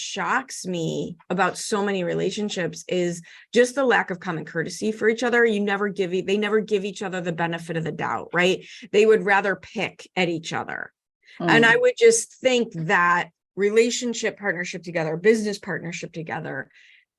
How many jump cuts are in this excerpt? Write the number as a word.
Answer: one